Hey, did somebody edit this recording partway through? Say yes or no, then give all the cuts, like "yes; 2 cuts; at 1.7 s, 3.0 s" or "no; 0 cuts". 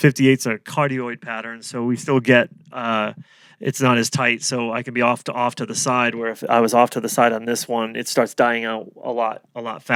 no; 0 cuts